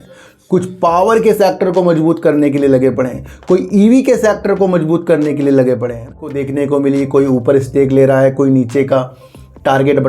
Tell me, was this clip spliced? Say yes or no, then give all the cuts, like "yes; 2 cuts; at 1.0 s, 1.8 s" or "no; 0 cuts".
yes; 1 cut; at 6.3 s